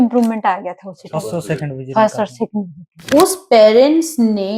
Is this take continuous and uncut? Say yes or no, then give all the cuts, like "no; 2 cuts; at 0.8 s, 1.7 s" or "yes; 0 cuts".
no; 1 cut; at 3.0 s